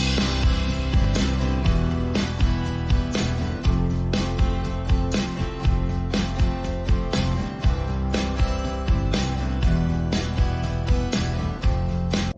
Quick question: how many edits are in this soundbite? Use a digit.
0